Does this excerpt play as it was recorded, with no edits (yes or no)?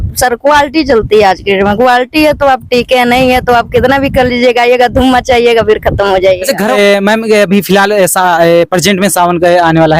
no